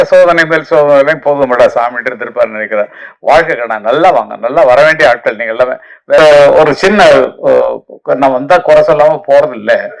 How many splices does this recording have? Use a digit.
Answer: 1